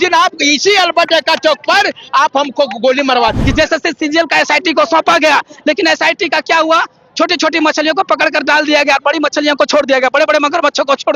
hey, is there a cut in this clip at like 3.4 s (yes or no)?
yes